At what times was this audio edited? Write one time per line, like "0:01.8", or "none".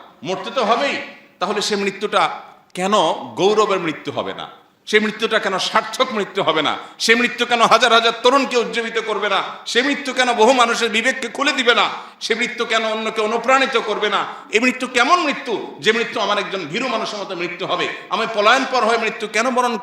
none